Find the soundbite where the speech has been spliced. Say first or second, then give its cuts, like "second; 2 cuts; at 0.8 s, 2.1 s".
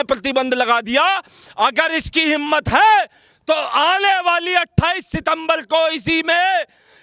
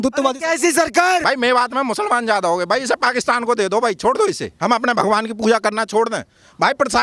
second; 2 cuts; at 1.2 s, 4.5 s